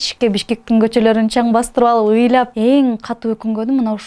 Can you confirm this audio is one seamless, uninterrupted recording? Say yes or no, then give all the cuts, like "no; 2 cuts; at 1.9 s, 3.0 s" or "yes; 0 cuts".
no; 1 cut; at 2.5 s